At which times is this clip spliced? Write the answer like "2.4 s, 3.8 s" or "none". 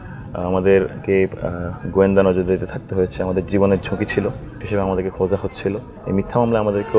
4.6 s, 6.0 s